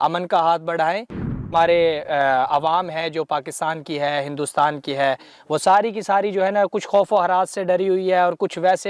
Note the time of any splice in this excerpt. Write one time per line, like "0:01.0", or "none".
0:01.4